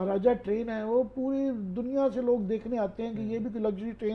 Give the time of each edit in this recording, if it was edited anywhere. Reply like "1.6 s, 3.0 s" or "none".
none